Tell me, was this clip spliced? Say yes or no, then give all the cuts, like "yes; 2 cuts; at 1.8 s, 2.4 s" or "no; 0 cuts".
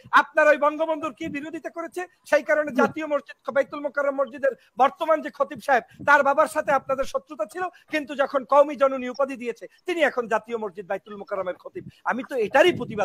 no; 0 cuts